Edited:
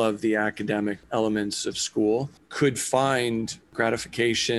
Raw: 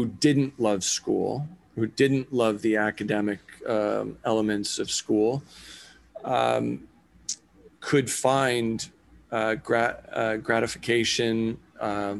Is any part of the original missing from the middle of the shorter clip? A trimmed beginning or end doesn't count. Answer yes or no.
yes